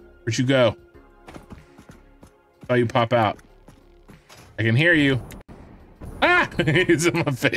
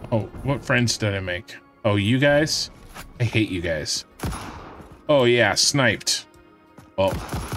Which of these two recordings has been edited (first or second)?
first